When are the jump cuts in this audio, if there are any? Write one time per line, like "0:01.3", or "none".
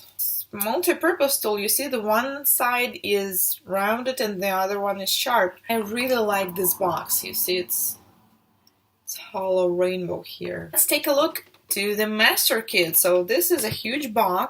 0:11.6